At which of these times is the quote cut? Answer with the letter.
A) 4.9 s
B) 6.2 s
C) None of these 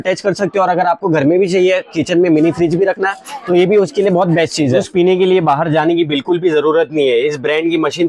A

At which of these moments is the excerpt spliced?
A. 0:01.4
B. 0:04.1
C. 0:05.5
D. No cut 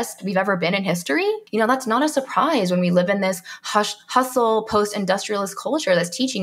A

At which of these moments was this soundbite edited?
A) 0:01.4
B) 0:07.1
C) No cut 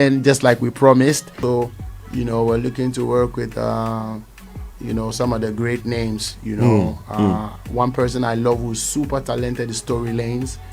A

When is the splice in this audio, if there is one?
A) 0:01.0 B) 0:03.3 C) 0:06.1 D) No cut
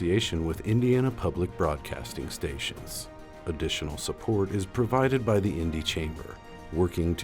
B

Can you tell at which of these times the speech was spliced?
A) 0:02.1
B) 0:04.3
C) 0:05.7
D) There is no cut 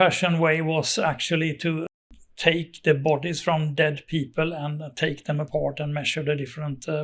D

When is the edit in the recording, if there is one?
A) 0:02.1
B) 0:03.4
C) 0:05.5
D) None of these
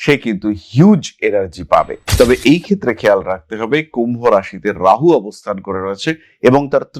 A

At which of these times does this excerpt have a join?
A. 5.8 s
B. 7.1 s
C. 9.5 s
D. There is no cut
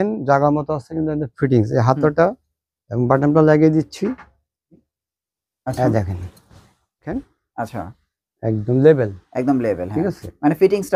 B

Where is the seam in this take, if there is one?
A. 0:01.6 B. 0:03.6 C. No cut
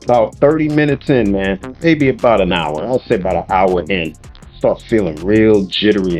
A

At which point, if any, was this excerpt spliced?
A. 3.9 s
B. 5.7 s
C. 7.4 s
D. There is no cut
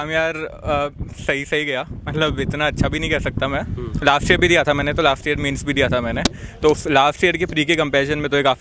D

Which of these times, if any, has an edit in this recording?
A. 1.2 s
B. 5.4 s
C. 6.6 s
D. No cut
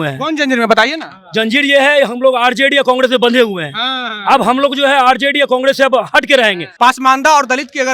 C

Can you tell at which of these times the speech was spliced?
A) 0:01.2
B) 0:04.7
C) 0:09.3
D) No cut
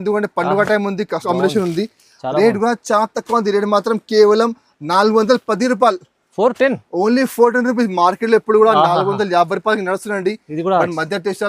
A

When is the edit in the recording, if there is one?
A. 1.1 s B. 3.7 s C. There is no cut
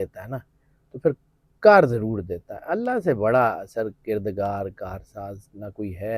C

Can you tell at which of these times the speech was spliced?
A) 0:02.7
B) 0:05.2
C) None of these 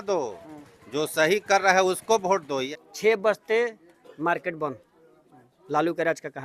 A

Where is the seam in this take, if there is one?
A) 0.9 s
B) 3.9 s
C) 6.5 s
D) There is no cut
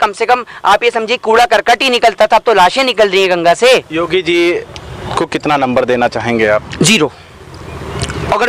B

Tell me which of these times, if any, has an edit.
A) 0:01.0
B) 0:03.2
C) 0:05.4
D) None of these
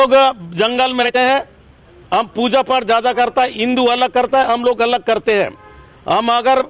A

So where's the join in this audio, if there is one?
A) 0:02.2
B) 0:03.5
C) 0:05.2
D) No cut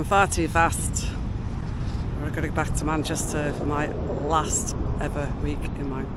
D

